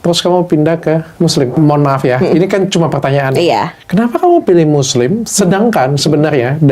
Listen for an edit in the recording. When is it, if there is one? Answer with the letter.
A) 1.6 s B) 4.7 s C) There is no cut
A